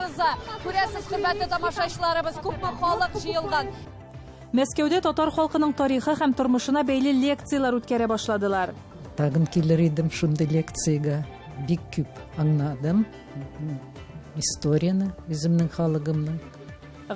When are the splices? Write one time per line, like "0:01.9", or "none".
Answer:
0:03.8